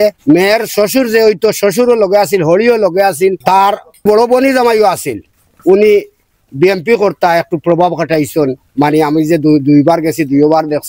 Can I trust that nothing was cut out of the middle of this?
yes; 0 cuts

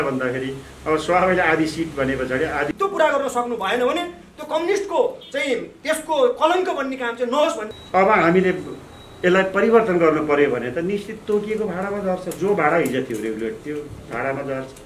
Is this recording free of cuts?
no; 2 cuts; at 2.7 s, 7.7 s

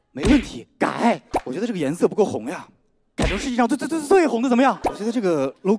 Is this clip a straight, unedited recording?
no; 2 cuts; at 1.5 s, 5.0 s

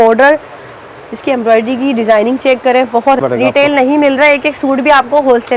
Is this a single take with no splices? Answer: no; 1 cut; at 3.2 s

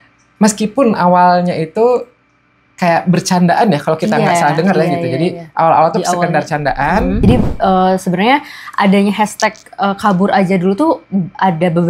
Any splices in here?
yes; 1 cut; at 7.2 s

